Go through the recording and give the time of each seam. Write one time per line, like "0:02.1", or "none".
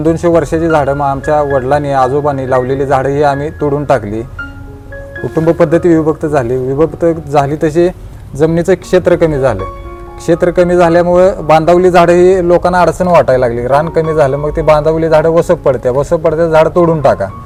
none